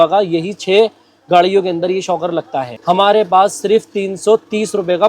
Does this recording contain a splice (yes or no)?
yes